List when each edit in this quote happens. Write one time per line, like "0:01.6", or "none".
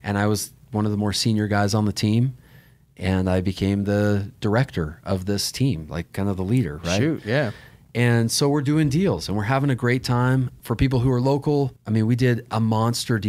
0:10.5
0:11.8